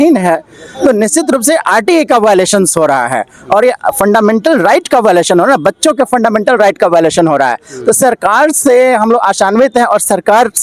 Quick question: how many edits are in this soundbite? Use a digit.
0